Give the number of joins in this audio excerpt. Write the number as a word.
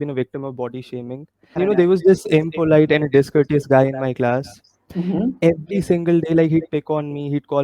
one